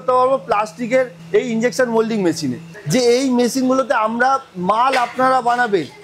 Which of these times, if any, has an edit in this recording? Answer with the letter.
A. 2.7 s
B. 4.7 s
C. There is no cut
A